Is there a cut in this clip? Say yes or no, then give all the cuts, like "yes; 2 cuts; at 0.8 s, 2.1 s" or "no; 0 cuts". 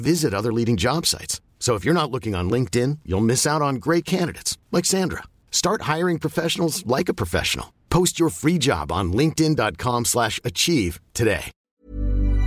yes; 1 cut; at 11.6 s